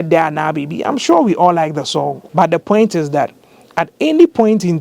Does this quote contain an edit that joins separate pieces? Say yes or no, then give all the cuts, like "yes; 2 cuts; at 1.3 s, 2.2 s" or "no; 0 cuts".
yes; 1 cut; at 2.2 s